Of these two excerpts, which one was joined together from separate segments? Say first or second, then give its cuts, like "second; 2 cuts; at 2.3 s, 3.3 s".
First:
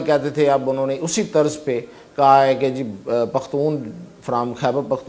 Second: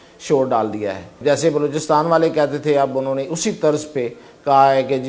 second; 1 cut; at 1.1 s